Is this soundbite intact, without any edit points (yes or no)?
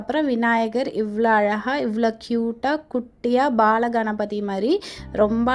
yes